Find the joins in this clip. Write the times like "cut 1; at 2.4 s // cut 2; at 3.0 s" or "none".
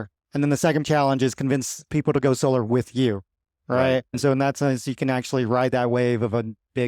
cut 1; at 0.8 s // cut 2; at 4.1 s